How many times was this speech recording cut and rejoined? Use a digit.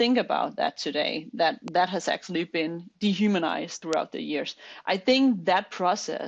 2